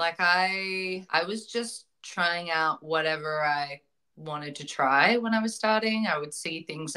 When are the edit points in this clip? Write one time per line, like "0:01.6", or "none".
0:01.1